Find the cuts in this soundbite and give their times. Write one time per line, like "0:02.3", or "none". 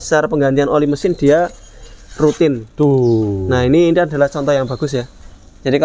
none